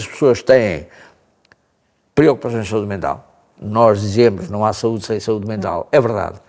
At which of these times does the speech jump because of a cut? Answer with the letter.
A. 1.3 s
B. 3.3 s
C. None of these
C